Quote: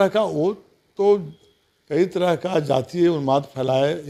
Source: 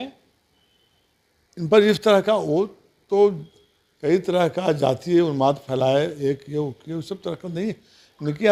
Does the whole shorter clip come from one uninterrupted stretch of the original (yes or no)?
yes